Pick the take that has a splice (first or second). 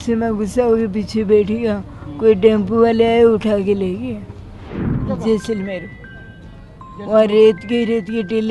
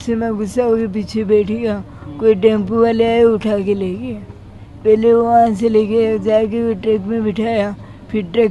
first